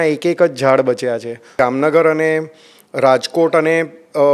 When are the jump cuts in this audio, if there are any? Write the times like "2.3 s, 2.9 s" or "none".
1.5 s